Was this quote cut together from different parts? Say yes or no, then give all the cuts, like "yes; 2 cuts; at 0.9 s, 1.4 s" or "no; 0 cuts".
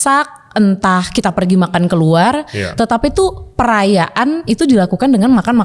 no; 0 cuts